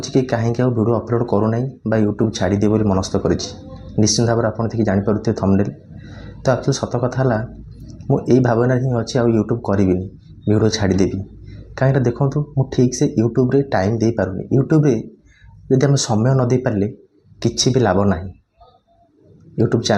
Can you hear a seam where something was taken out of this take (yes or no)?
no